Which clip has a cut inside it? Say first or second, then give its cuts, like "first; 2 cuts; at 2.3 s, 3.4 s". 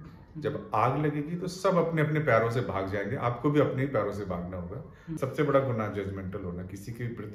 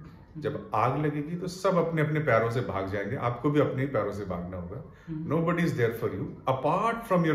first; 1 cut; at 5.2 s